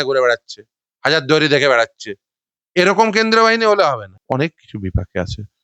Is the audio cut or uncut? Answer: cut